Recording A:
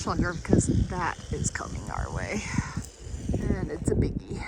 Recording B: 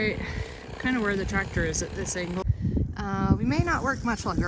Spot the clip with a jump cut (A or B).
B